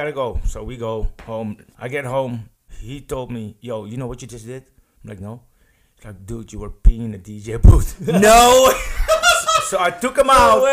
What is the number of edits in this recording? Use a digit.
2